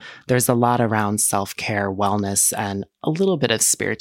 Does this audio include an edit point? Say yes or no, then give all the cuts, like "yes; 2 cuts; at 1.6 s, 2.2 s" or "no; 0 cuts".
no; 0 cuts